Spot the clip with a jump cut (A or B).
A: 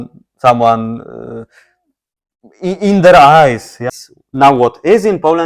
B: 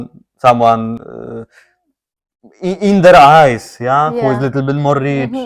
A